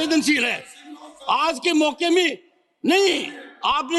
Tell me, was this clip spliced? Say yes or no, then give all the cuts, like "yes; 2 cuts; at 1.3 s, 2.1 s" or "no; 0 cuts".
no; 0 cuts